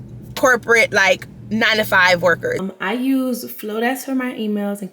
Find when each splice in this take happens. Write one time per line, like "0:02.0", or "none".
0:02.6